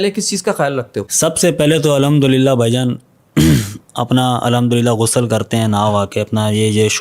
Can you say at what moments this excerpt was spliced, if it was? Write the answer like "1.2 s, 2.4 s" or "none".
1.1 s

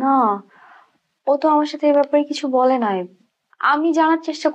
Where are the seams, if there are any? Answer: none

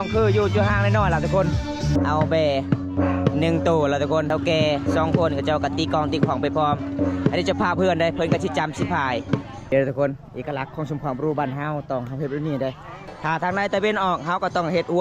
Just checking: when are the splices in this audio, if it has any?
1.9 s, 4.3 s, 9.7 s, 12.9 s

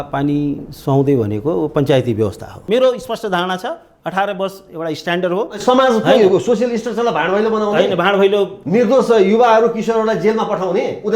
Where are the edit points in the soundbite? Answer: 2.5 s

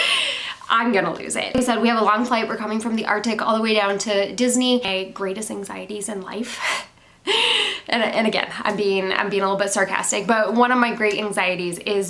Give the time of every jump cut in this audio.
1.6 s, 4.9 s

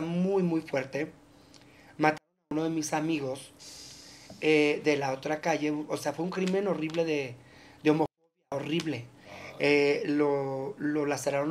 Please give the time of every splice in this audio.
none

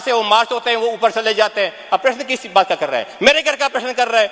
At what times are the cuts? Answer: none

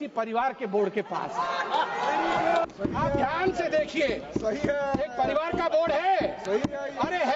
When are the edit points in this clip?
2.6 s

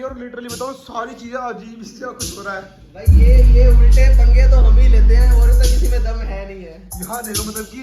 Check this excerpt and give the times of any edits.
none

